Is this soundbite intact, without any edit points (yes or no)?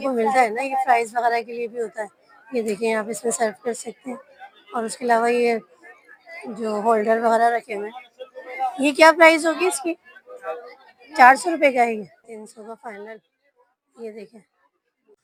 yes